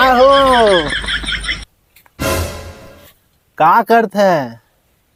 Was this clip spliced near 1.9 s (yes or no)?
no